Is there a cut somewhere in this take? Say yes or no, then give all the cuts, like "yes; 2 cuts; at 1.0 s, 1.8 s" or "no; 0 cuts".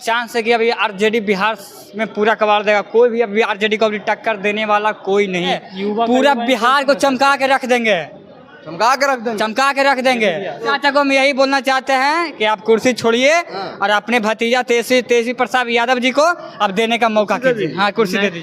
yes; 2 cuts; at 5.6 s, 10.7 s